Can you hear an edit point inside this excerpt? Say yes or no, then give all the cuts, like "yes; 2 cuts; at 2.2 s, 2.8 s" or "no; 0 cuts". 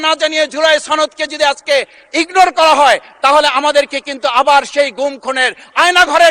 no; 0 cuts